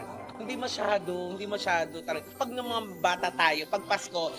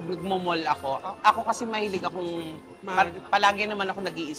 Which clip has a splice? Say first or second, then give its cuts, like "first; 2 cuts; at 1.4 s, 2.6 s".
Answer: first; 1 cut; at 2.4 s